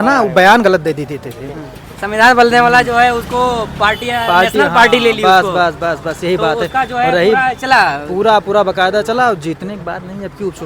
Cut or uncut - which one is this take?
uncut